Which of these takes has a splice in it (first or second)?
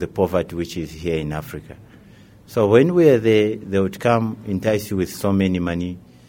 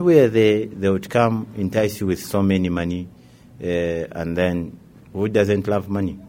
second